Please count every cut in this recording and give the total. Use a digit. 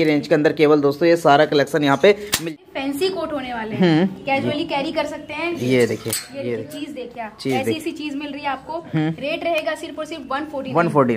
1